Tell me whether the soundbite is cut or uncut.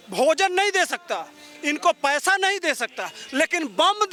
uncut